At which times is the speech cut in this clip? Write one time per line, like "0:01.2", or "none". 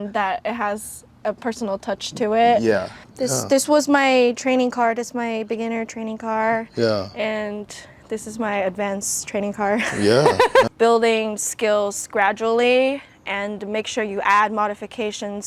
0:03.0
0:10.7